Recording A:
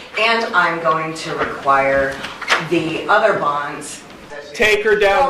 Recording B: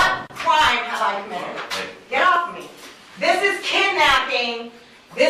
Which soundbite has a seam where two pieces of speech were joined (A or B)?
A